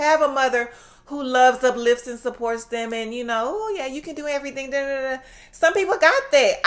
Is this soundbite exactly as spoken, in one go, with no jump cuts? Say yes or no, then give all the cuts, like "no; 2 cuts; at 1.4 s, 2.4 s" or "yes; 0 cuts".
yes; 0 cuts